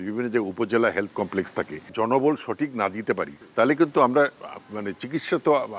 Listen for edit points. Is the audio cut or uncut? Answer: cut